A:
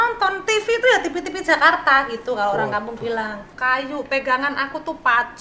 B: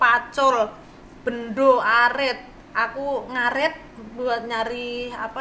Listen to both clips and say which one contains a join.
A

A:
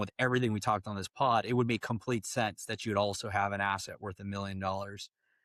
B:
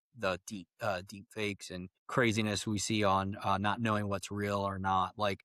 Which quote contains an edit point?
B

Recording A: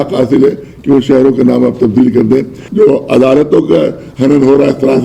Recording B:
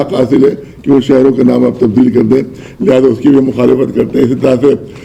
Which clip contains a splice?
A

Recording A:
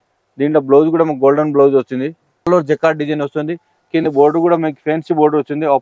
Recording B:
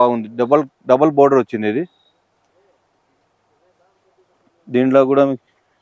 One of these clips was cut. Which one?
A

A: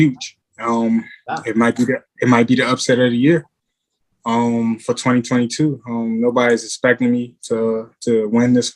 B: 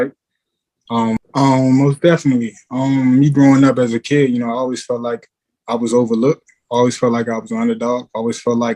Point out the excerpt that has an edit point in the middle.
B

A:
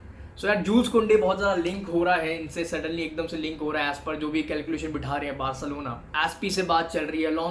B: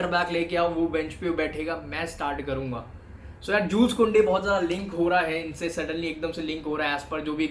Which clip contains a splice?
A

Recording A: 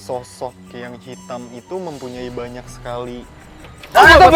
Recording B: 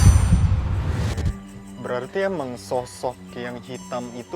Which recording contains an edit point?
B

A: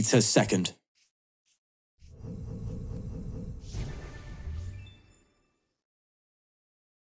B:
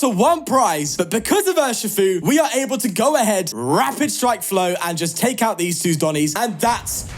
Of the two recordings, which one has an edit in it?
B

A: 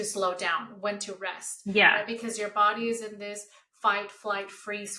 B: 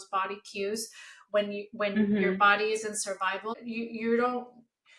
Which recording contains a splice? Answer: B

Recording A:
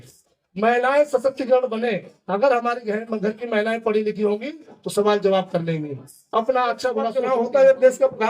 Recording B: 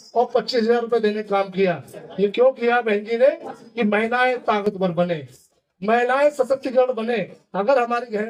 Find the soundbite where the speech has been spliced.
A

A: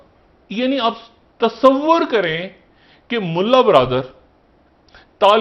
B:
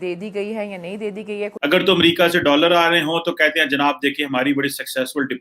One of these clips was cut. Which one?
B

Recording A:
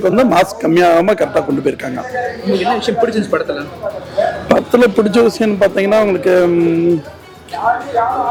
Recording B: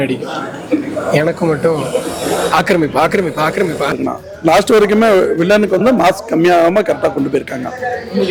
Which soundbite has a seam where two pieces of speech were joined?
B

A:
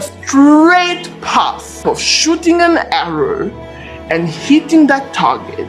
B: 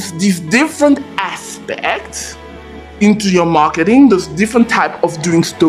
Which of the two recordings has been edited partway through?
A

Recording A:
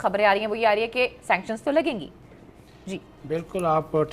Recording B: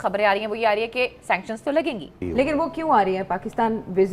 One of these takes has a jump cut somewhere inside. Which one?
B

